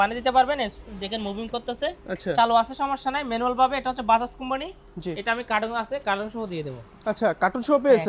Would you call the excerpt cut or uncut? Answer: uncut